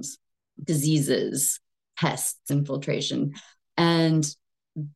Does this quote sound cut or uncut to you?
cut